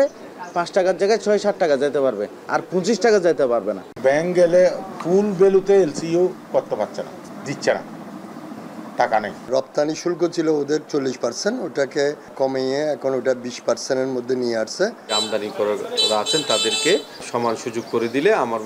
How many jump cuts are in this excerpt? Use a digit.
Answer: 6